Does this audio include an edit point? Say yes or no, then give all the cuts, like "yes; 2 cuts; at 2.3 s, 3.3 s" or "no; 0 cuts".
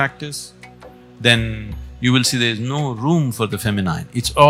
no; 0 cuts